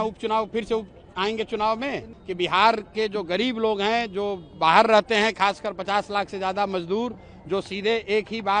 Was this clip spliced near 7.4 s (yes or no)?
no